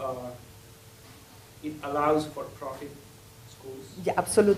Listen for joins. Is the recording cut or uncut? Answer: cut